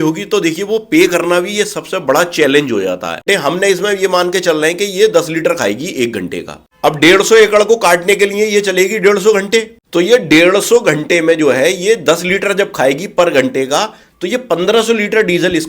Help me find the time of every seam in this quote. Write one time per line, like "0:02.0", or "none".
0:03.2